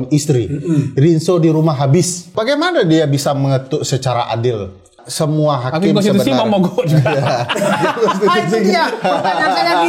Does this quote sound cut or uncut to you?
cut